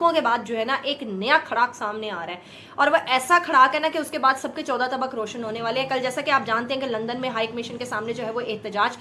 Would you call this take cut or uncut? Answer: uncut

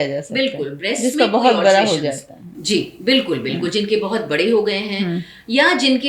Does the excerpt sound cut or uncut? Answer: uncut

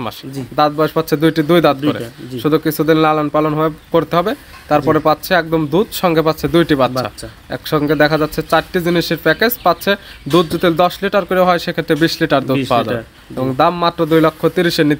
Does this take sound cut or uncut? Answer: uncut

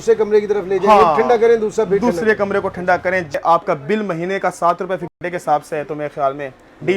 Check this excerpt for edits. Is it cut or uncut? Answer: cut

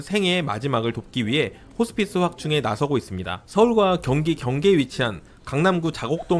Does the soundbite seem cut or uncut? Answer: uncut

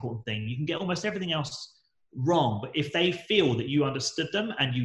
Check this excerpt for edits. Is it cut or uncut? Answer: uncut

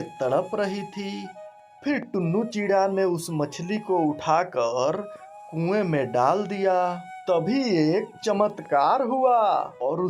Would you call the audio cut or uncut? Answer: uncut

